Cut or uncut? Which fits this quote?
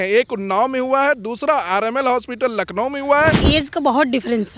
cut